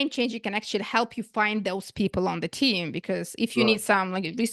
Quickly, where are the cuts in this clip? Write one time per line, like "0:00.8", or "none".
none